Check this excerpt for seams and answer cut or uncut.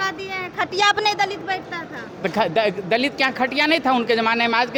uncut